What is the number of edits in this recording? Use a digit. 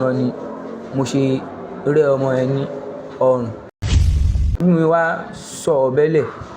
1